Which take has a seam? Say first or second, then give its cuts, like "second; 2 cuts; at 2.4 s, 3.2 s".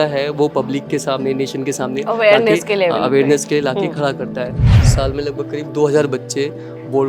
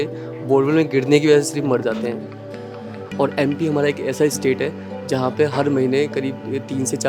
first; 1 cut; at 4.7 s